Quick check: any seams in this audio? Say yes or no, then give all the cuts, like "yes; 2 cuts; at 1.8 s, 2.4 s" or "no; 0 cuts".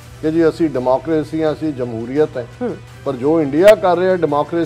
no; 0 cuts